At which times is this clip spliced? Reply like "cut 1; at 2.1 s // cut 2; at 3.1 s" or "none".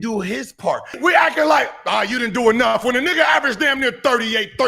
cut 1; at 1.0 s